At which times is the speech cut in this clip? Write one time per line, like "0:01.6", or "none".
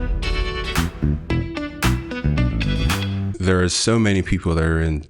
0:03.2